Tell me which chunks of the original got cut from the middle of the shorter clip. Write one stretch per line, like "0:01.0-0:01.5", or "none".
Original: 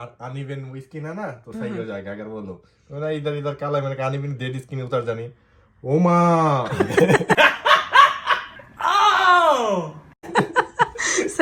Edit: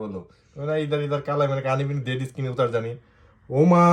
none